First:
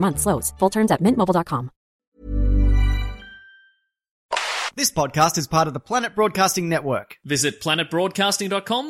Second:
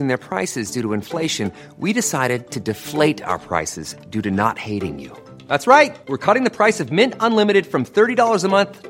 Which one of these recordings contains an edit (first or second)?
first